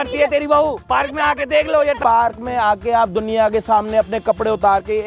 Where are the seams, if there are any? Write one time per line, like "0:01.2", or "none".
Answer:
0:02.0